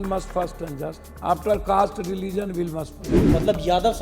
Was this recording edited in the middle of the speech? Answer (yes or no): yes